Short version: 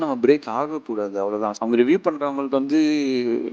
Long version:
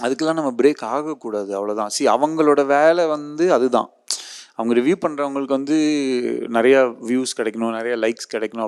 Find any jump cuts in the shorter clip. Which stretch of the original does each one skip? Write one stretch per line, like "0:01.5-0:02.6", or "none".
0:01.9-0:04.5